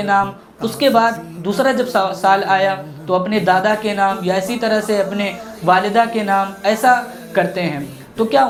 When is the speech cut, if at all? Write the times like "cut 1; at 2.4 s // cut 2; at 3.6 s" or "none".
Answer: none